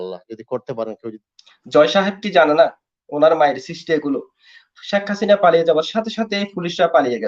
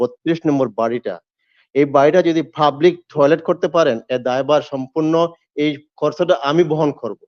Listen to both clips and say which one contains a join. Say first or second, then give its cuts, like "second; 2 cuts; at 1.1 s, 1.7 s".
first; 1 cut; at 1.1 s